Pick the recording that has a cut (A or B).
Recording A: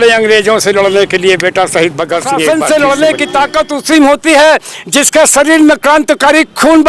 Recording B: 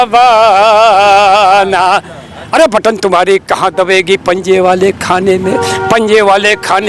A